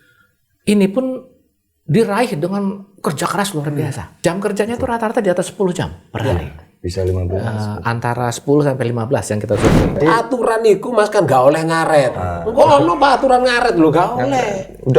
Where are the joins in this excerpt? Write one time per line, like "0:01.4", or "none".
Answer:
0:04.2
0:10.0